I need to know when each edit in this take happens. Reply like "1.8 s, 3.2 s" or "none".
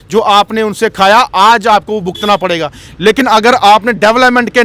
none